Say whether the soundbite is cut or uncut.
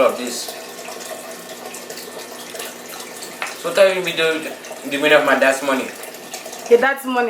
uncut